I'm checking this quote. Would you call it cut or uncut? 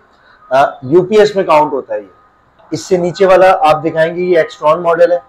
cut